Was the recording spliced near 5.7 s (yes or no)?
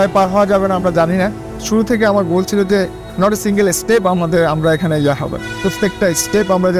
no